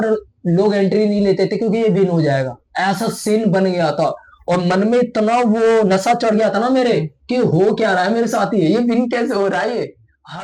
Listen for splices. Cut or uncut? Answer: uncut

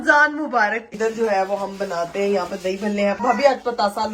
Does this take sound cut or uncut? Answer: cut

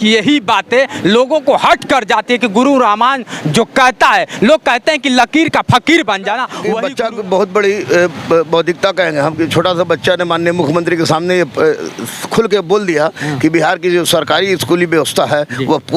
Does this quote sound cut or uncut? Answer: cut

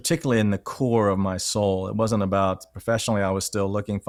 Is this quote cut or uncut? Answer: uncut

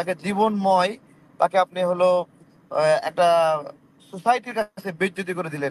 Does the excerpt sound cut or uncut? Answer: uncut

